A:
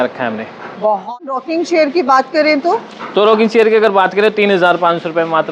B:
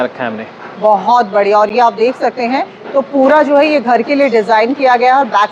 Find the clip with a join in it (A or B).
A